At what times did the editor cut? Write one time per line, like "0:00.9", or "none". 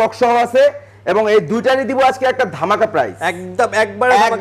none

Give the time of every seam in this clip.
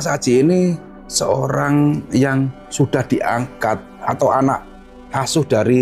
none

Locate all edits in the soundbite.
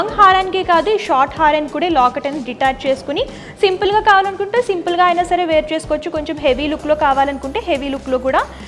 none

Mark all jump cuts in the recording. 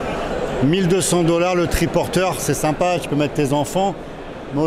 none

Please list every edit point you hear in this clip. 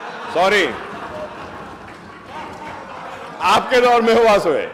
none

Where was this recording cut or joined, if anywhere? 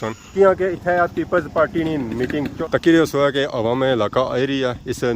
0:02.6

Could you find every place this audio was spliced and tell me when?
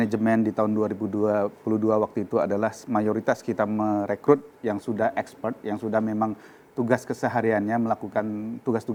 none

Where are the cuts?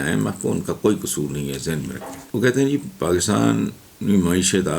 0:02.1

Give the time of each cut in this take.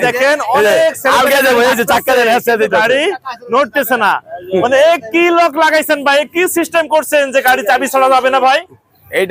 none

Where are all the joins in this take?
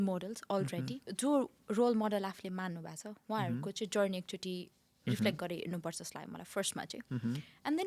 0:01.0

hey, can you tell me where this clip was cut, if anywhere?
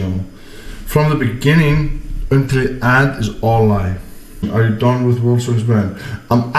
0:04.5

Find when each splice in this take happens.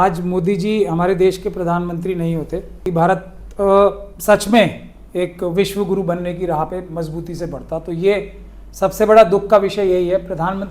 0:02.8

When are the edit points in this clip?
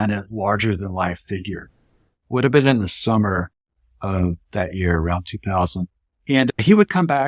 0:01.9

